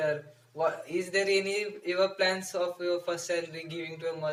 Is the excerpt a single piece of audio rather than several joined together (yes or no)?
yes